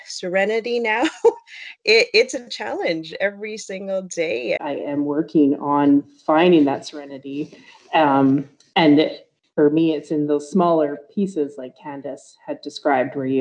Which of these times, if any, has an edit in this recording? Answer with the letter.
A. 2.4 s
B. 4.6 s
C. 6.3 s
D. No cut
B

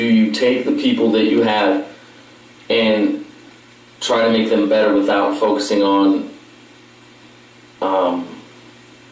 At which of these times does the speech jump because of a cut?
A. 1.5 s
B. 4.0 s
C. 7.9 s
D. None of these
D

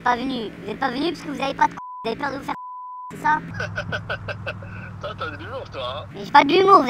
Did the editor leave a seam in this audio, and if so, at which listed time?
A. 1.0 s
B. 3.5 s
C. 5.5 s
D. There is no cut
D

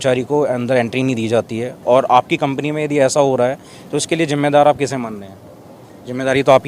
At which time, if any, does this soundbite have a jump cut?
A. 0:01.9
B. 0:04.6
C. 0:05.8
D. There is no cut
D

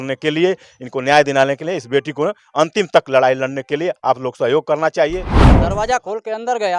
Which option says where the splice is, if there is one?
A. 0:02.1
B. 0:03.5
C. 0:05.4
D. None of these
C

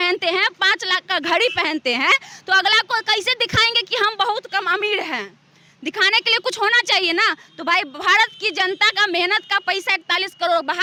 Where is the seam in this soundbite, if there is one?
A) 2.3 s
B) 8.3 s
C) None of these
C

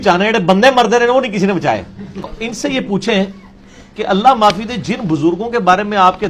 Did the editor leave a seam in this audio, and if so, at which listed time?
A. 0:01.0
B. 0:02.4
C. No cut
B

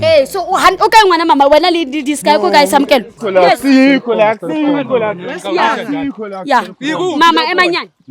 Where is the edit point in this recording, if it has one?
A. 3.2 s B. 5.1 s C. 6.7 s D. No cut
A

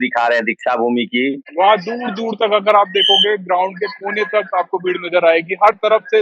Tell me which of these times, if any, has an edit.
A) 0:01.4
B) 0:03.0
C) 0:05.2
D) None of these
A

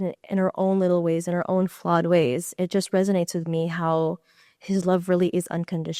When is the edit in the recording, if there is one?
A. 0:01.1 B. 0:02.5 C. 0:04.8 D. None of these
B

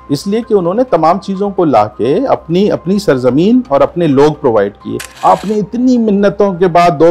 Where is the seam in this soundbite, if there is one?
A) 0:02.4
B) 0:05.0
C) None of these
B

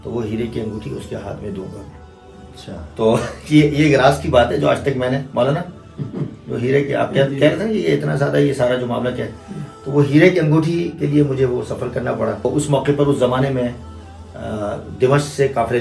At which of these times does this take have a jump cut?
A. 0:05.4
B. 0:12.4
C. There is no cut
B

